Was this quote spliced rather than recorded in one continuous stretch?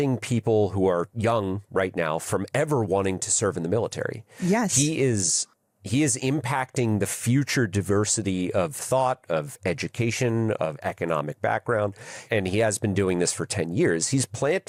no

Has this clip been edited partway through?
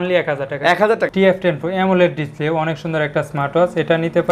yes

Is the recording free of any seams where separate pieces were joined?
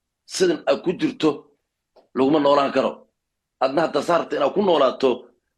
yes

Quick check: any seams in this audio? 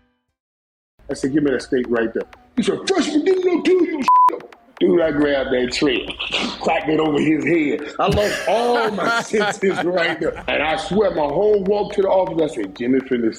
yes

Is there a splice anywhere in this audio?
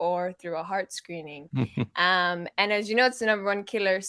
no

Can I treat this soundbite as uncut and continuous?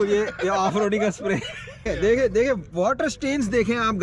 no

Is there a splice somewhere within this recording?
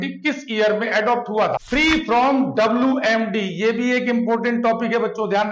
yes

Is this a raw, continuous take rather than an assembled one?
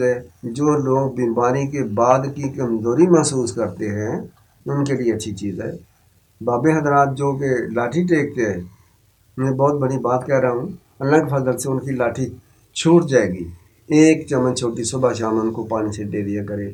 yes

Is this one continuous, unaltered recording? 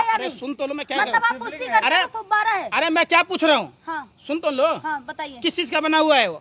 yes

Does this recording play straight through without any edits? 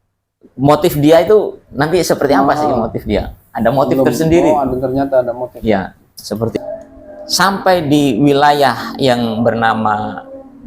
no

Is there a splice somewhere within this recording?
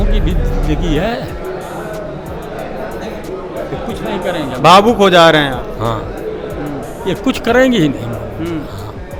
no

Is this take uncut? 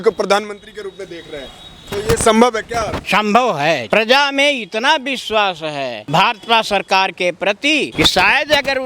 no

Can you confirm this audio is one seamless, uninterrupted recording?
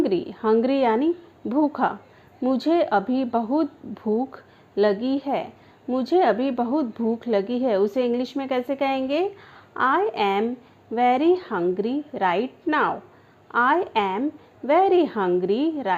yes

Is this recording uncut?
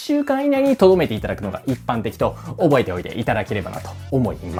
yes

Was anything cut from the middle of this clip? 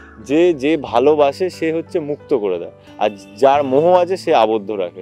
no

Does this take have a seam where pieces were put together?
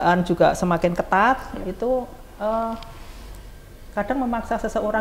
no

